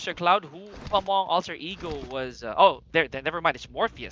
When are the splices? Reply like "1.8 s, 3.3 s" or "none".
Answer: none